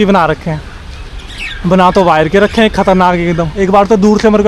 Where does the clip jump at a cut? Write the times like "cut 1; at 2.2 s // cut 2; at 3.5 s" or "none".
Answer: none